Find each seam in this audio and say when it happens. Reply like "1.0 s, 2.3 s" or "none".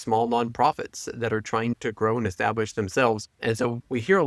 3.3 s